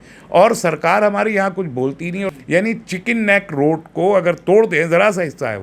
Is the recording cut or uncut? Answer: cut